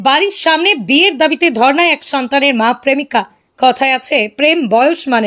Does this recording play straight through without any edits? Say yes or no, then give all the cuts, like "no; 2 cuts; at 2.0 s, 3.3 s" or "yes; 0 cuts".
no; 1 cut; at 3.3 s